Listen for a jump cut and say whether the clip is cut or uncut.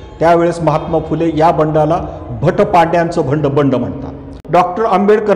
cut